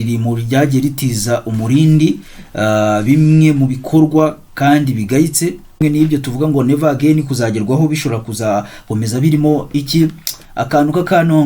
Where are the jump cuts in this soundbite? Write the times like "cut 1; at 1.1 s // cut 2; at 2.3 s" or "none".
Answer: cut 1; at 5.8 s

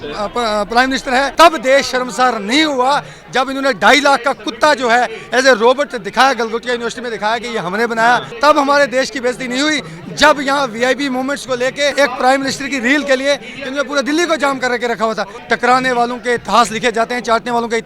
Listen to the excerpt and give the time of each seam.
cut 1; at 1.3 s // cut 2; at 8.3 s // cut 3; at 11.9 s // cut 4; at 15.3 s

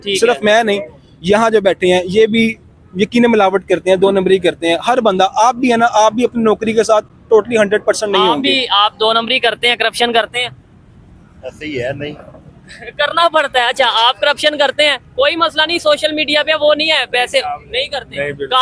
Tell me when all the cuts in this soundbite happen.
none

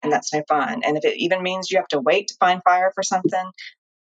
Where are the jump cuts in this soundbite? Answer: none

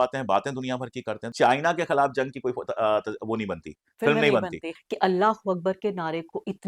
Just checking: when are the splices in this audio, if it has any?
cut 1; at 1.3 s // cut 2; at 4.7 s

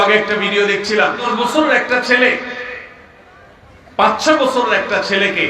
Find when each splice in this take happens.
cut 1; at 1.3 s

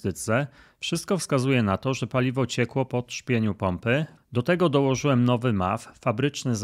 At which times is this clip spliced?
cut 1; at 4.2 s

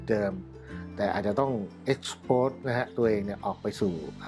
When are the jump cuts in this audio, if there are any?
none

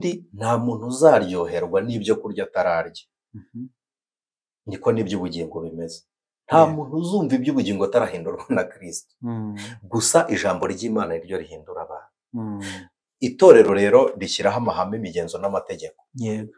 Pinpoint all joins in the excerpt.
none

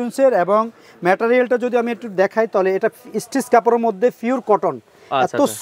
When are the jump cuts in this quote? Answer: none

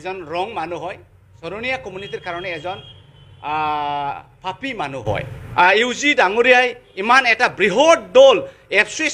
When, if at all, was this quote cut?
cut 1; at 1.3 s // cut 2; at 5.4 s

